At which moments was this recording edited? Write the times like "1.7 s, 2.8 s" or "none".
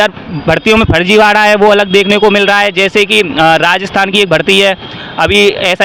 none